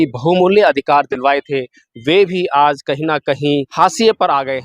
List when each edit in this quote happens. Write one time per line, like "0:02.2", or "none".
0:03.7